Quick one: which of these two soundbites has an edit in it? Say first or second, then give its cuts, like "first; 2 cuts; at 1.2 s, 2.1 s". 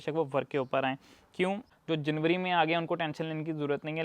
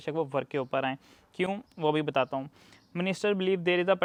first; 1 cut; at 1.7 s